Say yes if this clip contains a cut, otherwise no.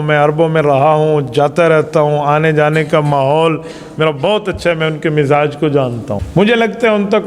yes